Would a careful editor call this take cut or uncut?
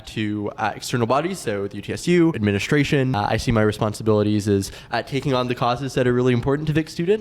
cut